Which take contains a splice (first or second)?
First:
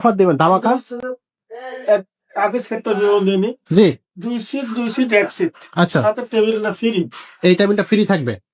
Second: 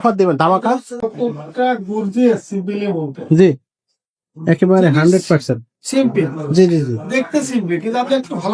second